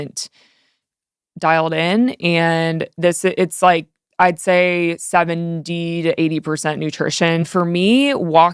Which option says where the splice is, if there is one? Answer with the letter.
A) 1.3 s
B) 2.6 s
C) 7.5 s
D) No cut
C